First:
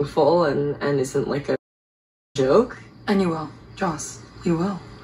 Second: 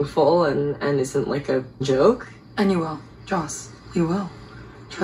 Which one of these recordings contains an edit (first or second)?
second